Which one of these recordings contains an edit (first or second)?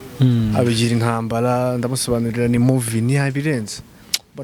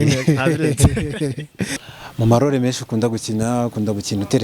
second